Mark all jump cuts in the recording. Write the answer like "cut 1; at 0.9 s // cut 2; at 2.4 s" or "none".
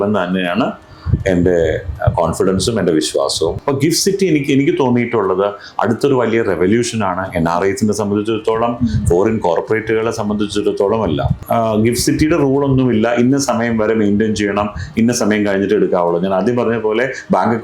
cut 1; at 3.6 s // cut 2; at 11.3 s